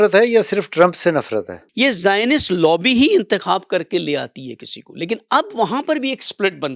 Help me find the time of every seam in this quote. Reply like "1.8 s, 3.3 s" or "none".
1.6 s